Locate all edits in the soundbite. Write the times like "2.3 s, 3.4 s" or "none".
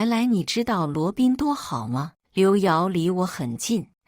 2.2 s